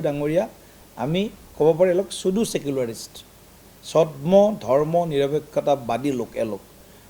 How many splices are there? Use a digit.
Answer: 0